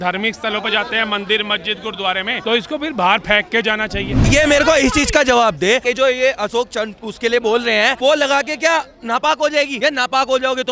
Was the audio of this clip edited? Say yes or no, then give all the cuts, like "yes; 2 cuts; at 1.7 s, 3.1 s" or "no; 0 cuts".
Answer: yes; 5 cuts; at 2.3 s, 4.2 s, 5.8 s, 8.0 s, 9.7 s